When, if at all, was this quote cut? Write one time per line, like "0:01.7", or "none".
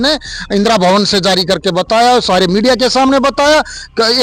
none